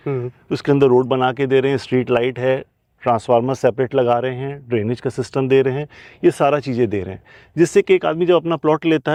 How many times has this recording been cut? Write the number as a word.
zero